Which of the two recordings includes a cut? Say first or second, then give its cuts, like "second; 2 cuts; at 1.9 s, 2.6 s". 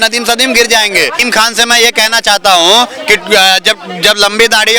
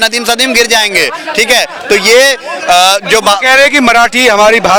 first; 1 cut; at 1.2 s